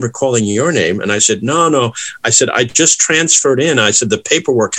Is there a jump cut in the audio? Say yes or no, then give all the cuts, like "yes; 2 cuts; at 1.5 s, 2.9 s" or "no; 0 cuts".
no; 0 cuts